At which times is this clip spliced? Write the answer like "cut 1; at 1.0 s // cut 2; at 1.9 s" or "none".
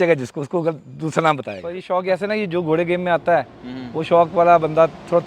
cut 1; at 1.7 s